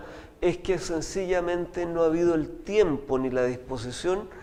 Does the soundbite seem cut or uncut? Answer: uncut